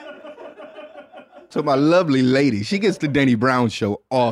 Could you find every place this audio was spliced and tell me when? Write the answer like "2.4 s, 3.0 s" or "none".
1.5 s